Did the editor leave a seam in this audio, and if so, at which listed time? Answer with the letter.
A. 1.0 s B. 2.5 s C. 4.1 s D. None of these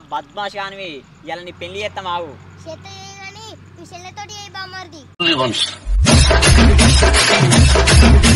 D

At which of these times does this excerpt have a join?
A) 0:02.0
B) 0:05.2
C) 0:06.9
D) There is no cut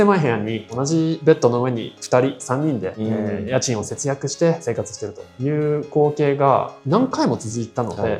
D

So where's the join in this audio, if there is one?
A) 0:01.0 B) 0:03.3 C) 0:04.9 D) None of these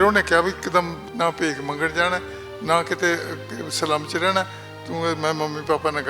A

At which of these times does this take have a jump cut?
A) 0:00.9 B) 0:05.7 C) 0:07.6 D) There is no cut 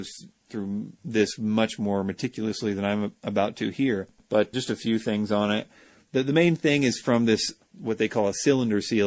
B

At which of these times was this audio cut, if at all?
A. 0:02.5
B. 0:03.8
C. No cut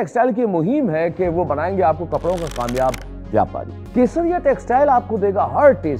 B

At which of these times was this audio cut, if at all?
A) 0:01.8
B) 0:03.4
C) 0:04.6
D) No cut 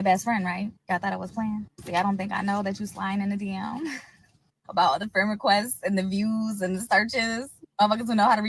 D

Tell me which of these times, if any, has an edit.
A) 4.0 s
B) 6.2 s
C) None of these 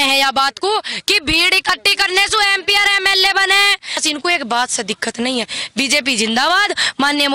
A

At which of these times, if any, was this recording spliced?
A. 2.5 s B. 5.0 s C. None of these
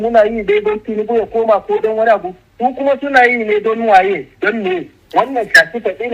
B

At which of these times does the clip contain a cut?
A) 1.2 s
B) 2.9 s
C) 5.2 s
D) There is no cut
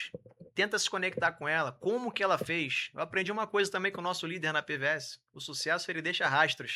D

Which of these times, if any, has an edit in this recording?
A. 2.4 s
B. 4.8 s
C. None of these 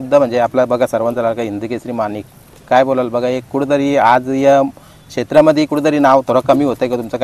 C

